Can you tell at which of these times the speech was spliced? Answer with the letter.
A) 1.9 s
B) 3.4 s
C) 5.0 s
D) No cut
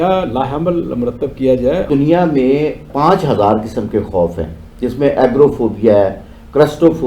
A